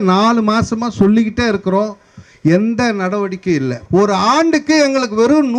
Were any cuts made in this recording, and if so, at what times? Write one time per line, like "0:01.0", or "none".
0:03.8